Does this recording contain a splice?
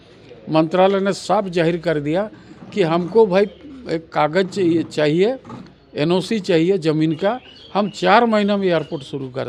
no; 0 cuts

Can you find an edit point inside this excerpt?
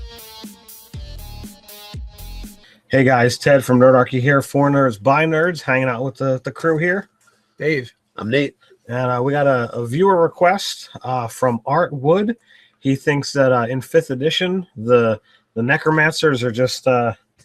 no; 0 cuts

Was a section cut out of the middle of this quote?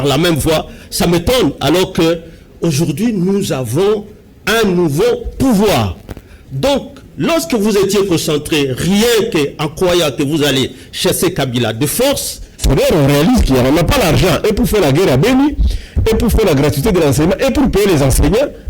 yes; 1 cut; at 12.6 s

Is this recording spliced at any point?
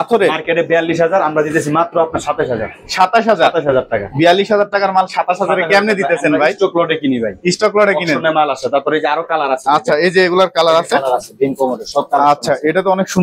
no; 0 cuts

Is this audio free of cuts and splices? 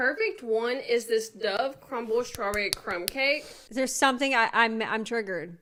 yes; 0 cuts

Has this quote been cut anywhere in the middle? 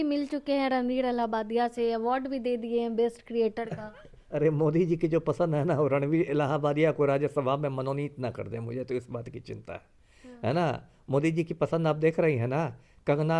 no; 0 cuts

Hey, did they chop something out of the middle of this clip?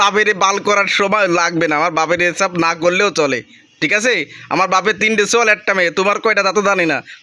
no; 0 cuts

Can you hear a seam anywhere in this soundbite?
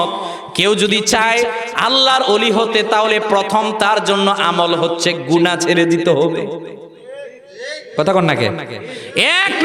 no; 0 cuts

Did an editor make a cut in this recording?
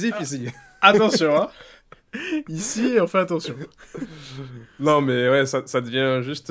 no; 0 cuts

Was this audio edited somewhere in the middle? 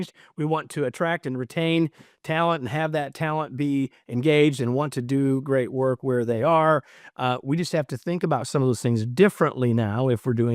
no; 0 cuts

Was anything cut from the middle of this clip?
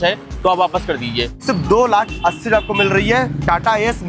yes; 1 cut; at 1.4 s

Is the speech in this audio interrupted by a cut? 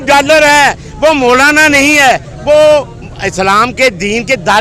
no; 0 cuts

